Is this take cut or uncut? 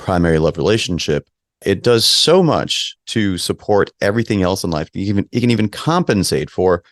uncut